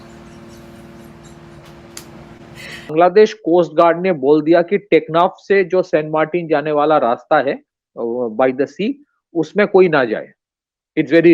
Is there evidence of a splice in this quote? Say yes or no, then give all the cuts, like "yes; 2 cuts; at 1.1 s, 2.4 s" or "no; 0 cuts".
yes; 1 cut; at 2.9 s